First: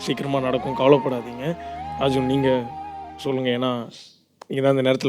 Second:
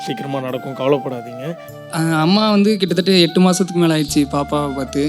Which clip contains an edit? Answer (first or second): second